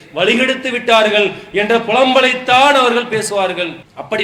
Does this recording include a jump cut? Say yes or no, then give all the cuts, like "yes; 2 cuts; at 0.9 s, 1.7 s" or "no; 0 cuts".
no; 0 cuts